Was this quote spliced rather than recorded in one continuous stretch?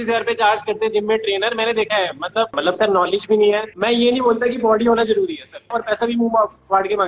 yes; 3 cuts; at 2.5 s, 3.7 s, 5.7 s

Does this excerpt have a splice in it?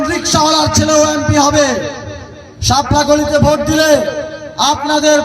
yes; 1 cut; at 2.0 s

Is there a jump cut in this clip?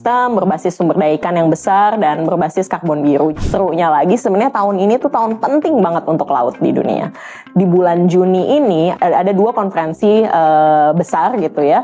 yes; 3 cuts; at 3.3 s, 7.3 s, 8.9 s

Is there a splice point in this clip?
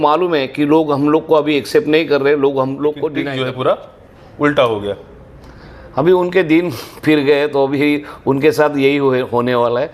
yes; 1 cut; at 3.2 s

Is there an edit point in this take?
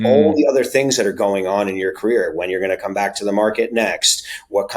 no; 0 cuts

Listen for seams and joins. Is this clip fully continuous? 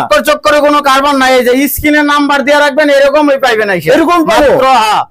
yes; 0 cuts

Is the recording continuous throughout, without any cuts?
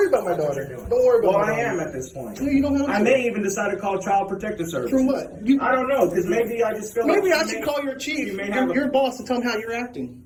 yes; 0 cuts

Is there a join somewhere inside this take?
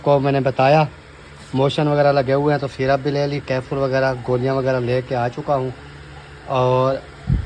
no; 0 cuts

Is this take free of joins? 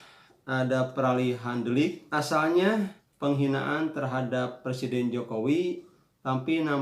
no; 2 cuts; at 2.0 s, 3.0 s

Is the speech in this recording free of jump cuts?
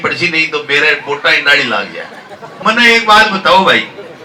no; 1 cut; at 2.6 s

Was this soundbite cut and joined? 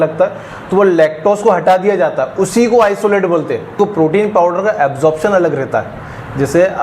yes; 1 cut; at 3.8 s

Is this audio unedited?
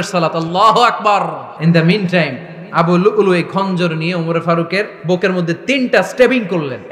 no; 2 cuts; at 1.5 s, 5.0 s

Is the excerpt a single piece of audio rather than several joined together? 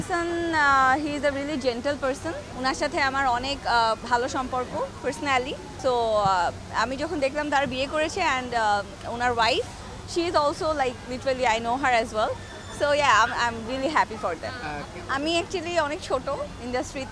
no; 4 cuts; at 2.5 s, 4.0 s, 5.7 s, 14.9 s

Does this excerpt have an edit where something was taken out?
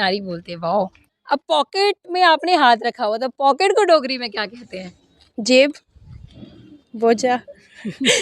yes; 1 cut; at 1.0 s

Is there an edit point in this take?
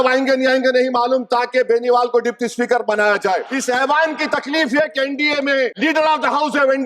yes; 2 cuts; at 3.5 s, 5.7 s

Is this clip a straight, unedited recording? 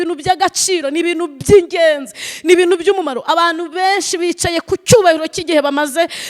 yes; 0 cuts

